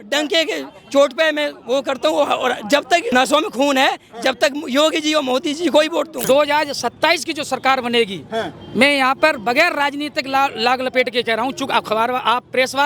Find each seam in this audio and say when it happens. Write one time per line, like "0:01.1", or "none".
0:03.1
0:06.2